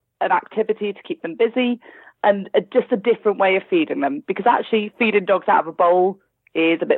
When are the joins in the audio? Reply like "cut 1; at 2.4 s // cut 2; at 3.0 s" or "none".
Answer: cut 1; at 2.1 s